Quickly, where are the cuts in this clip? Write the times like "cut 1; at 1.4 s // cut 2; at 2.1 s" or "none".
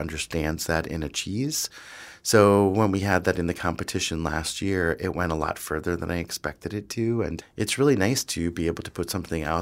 cut 1; at 7.4 s